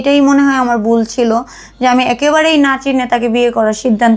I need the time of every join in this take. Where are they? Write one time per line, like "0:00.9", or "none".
none